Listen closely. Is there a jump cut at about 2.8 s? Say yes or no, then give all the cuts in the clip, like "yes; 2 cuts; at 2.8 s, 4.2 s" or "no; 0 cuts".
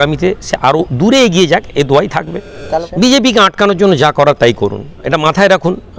yes; 1 cut; at 2.8 s